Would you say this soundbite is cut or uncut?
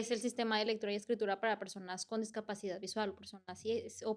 uncut